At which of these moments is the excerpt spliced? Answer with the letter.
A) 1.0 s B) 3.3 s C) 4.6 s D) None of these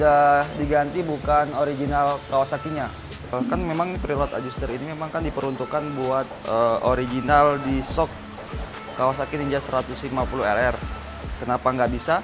B